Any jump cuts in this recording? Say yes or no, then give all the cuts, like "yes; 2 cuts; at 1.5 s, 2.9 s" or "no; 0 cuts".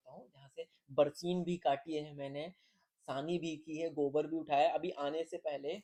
no; 0 cuts